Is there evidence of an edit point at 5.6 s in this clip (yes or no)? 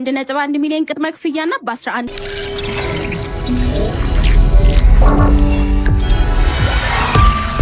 no